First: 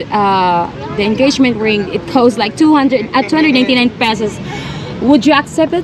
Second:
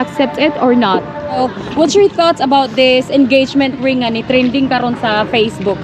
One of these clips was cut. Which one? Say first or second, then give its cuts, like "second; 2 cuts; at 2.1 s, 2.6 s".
second; 1 cut; at 1.4 s